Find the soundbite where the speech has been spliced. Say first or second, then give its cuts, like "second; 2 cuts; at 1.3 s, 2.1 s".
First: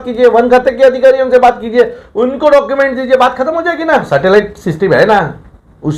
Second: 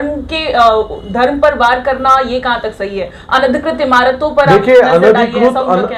first; 1 cut; at 4.1 s